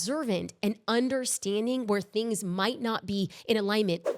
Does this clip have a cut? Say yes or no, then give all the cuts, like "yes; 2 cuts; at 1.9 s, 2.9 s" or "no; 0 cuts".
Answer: no; 0 cuts